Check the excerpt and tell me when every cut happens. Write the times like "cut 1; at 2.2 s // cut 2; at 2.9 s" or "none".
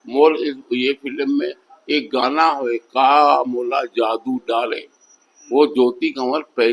none